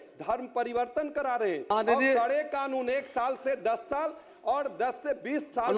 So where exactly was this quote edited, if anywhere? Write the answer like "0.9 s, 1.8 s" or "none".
1.7 s